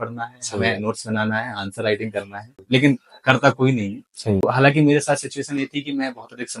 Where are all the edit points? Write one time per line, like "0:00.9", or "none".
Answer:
0:02.6
0:04.4